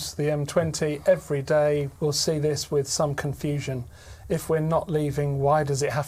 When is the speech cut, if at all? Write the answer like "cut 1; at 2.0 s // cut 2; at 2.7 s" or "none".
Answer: cut 1; at 1.9 s